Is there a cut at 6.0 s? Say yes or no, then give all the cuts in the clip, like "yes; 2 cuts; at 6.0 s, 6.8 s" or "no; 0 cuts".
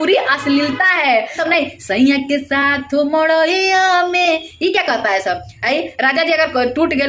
no; 1 cut; at 1.4 s